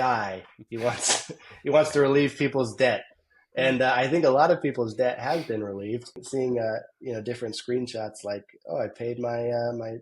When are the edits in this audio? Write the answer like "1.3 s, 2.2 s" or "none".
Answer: 6.2 s